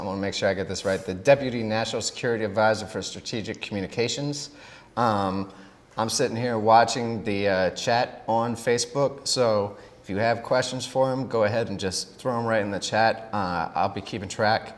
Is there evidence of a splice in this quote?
yes; 1 cut; at 9.4 s

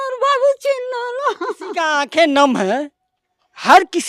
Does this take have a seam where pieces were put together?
yes; 1 cut; at 1.7 s

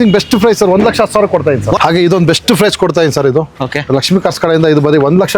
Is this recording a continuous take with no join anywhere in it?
no; 1 cut; at 1.8 s

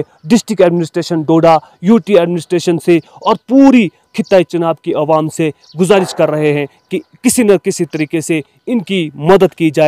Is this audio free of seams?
yes; 0 cuts

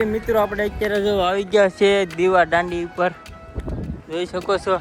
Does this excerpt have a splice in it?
no; 0 cuts

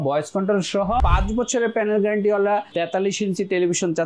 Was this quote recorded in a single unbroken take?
no; 2 cuts; at 1.0 s, 2.7 s

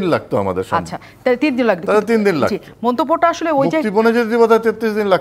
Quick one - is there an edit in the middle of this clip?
no; 0 cuts

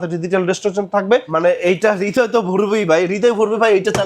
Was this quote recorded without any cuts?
no; 1 cut; at 1.3 s

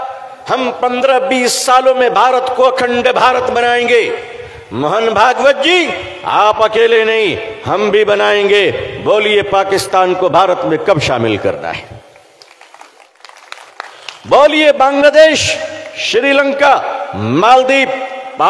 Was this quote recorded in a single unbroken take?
no; 1 cut; at 13.2 s

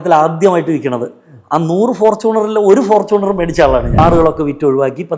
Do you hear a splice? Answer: yes; 1 cut; at 4.0 s

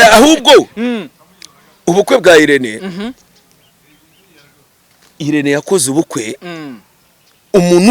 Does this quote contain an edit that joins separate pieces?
no; 0 cuts

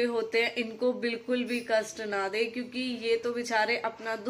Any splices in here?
no; 0 cuts

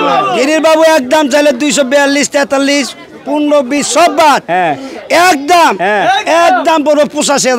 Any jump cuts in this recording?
no; 0 cuts

